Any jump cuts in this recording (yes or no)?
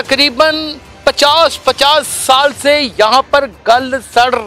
no